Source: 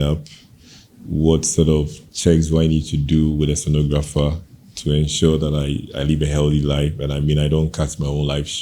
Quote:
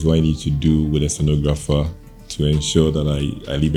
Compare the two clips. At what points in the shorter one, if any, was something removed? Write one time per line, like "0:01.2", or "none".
none